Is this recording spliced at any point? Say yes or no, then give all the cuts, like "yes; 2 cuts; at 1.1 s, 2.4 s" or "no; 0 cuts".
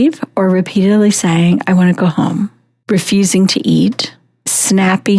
no; 0 cuts